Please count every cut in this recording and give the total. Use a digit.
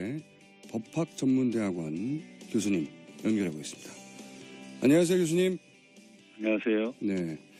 0